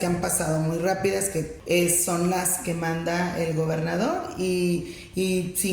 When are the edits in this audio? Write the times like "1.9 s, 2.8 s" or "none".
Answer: 1.6 s